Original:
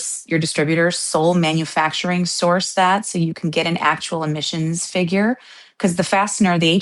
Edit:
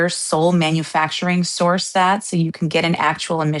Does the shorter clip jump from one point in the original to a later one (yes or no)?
no